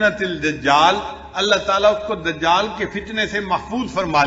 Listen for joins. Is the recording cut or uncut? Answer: uncut